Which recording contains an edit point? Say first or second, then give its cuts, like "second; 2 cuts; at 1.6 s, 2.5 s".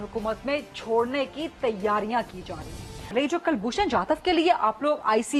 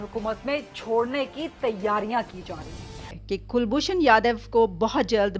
second; 1 cut; at 2.9 s